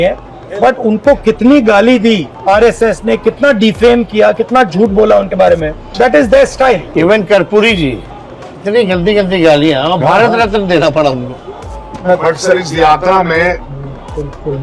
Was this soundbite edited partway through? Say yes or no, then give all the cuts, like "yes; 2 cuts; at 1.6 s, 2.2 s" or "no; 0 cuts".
no; 0 cuts